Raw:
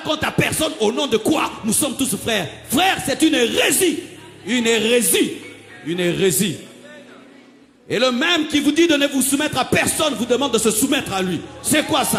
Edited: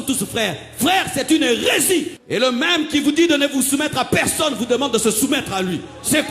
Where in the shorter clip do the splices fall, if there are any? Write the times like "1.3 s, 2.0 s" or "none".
2.2 s